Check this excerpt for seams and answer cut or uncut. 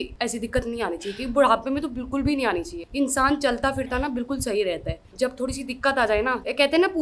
uncut